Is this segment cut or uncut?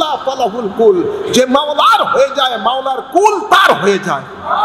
uncut